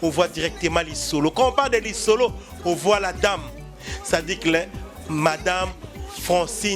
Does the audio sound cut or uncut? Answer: uncut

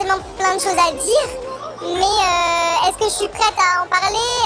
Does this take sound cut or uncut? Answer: uncut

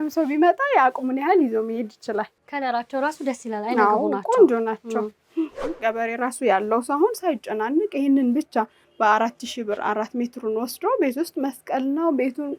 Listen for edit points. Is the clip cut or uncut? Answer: cut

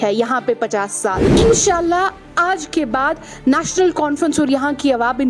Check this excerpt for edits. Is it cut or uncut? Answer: cut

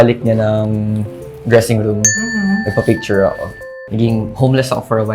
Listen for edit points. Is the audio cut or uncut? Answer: cut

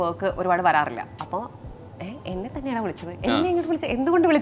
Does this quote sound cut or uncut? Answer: uncut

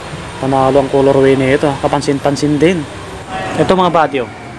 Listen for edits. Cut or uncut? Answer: cut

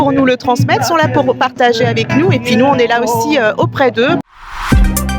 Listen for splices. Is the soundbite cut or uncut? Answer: cut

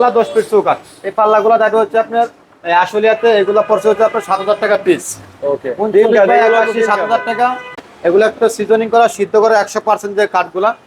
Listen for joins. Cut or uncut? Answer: cut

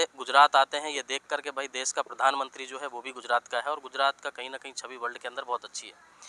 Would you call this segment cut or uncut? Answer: uncut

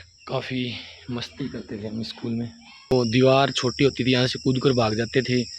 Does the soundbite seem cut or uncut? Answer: cut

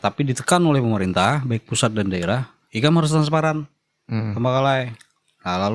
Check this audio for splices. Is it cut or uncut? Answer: uncut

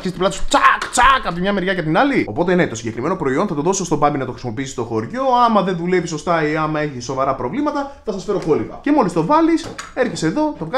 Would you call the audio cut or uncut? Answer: cut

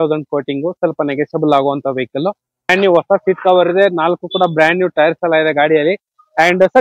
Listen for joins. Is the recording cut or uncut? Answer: cut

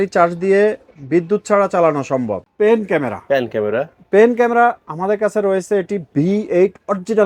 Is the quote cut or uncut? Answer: cut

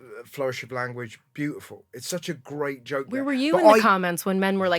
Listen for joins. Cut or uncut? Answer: uncut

